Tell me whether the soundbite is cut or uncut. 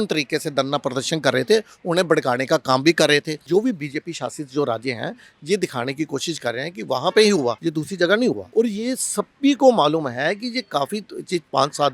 cut